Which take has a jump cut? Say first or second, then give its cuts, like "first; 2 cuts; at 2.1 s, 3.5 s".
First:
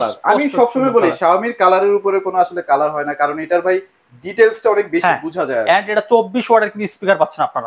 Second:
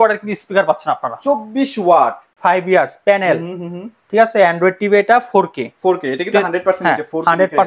second; 1 cut; at 2.2 s